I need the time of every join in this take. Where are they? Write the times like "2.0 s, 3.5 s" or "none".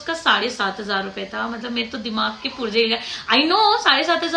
none